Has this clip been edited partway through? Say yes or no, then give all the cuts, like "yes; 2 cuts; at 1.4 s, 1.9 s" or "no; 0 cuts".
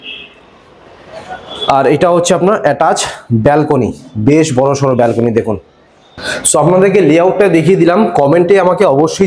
no; 0 cuts